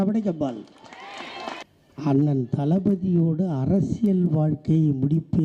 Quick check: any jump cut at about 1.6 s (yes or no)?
yes